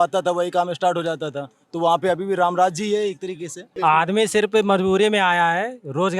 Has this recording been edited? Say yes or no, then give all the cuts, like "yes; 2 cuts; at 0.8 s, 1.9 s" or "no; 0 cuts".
yes; 1 cut; at 3.6 s